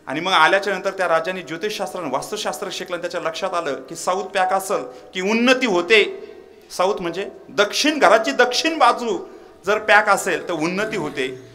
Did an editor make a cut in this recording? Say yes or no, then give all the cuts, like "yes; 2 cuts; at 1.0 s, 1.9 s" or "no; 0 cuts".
no; 0 cuts